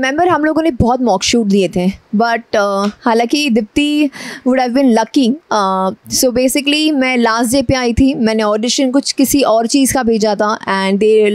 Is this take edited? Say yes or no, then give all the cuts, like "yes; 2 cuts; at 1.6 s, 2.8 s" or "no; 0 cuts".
no; 0 cuts